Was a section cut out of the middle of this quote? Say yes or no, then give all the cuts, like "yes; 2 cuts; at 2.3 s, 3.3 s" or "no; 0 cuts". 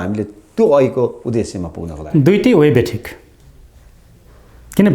no; 0 cuts